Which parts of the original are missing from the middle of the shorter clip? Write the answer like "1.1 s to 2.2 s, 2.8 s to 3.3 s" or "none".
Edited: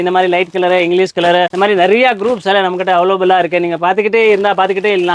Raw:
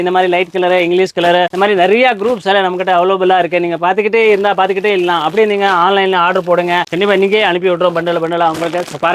none